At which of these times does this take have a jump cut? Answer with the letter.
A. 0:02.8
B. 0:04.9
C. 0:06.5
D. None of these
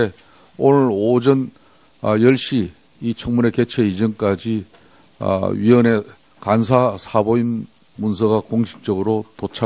B